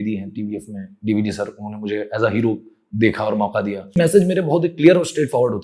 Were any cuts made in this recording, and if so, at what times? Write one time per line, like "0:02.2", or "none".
0:04.0